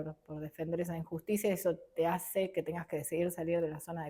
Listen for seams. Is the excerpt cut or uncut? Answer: uncut